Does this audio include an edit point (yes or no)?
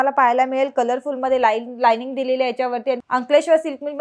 yes